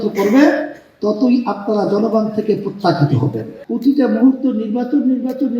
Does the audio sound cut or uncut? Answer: cut